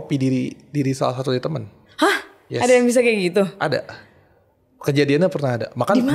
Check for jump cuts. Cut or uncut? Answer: uncut